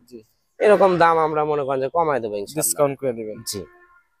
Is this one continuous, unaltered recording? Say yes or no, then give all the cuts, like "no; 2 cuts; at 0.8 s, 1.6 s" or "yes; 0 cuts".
yes; 0 cuts